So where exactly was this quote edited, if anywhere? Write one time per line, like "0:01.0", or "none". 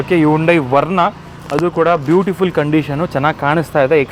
none